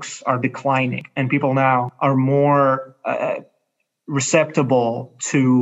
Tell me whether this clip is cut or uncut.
cut